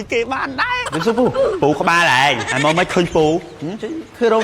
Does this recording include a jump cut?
yes; 2 cuts; at 0.9 s, 2.5 s

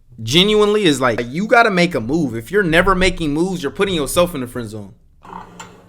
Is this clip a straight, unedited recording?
yes; 0 cuts

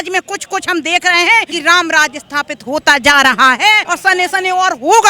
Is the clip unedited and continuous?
no; 2 cuts; at 1.5 s, 3.9 s

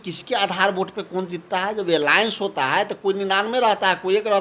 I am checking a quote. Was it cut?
no; 0 cuts

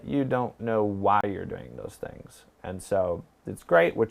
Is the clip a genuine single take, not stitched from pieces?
yes; 0 cuts

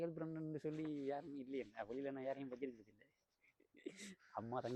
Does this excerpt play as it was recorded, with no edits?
yes; 0 cuts

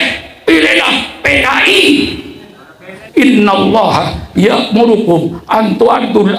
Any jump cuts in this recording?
yes; 1 cut; at 2.9 s

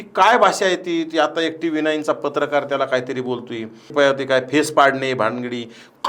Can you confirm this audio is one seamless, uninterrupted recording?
no; 1 cut; at 3.9 s

